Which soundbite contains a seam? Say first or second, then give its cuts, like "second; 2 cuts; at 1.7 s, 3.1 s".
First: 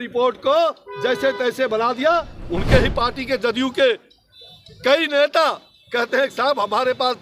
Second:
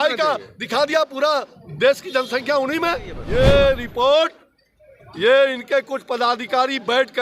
second; 1 cut; at 3.2 s